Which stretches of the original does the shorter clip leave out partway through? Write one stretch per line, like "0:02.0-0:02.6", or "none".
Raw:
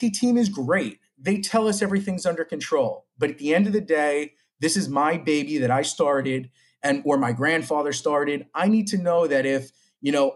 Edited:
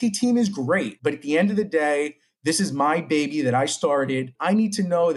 0:00.9-0:03.1
0:06.5-0:08.5